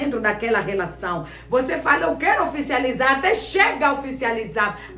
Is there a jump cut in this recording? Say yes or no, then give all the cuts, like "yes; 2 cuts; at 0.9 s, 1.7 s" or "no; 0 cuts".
no; 0 cuts